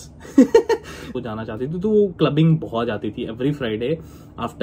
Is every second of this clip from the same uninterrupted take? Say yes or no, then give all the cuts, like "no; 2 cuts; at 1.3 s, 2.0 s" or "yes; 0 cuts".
no; 1 cut; at 1.1 s